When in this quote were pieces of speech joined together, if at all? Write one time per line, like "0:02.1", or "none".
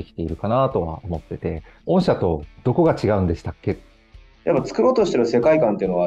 0:01.7
0:02.6
0:03.9